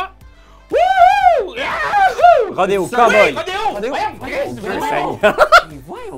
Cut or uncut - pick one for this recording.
uncut